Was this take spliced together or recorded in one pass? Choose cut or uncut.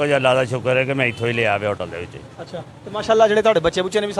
uncut